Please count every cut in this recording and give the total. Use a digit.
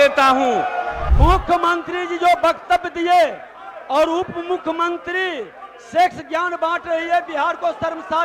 1